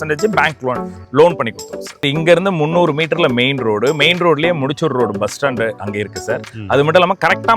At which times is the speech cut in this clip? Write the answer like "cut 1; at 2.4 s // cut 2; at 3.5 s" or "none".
cut 1; at 2.1 s

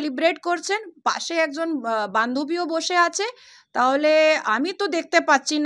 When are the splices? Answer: none

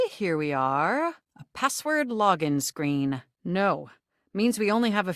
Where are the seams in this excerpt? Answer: cut 1; at 3.3 s

